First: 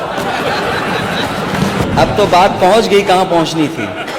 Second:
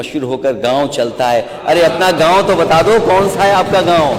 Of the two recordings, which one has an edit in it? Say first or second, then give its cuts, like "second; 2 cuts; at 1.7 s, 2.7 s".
first; 1 cut; at 1.8 s